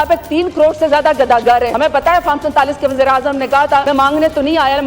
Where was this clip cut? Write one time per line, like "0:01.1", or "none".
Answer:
0:01.7
0:03.8